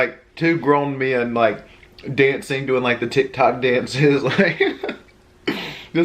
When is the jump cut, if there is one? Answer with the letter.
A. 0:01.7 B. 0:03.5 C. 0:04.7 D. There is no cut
D